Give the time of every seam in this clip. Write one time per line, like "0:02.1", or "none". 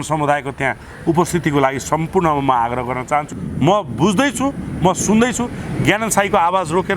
0:03.3